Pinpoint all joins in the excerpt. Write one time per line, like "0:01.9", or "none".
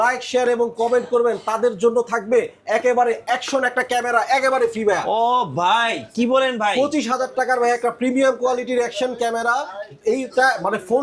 none